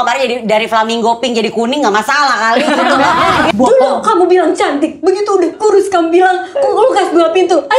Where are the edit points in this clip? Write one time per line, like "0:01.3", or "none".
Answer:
0:03.5